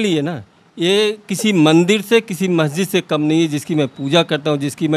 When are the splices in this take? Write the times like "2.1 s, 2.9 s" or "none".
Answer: none